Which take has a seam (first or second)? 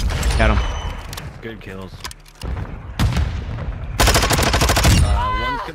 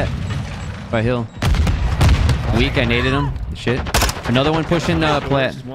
first